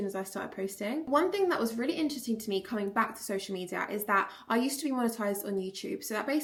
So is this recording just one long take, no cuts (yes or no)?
yes